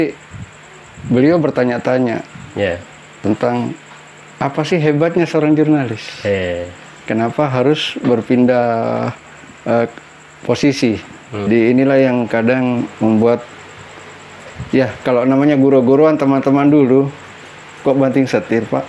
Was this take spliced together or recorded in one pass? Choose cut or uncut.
cut